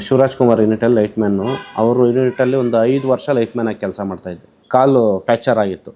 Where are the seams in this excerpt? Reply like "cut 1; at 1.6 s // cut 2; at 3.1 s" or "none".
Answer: cut 1; at 4.5 s